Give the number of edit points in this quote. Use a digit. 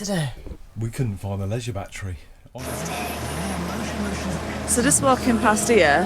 1